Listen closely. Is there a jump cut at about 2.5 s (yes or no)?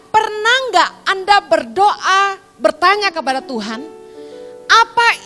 no